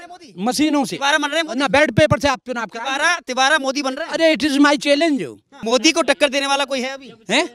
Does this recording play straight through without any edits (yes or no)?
no